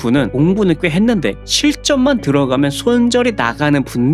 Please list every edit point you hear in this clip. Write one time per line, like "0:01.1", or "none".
none